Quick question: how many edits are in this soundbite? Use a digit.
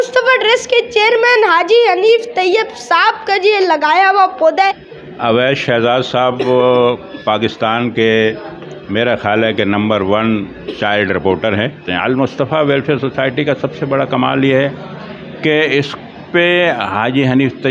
2